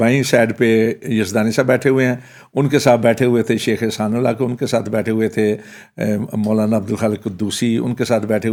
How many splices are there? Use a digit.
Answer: 0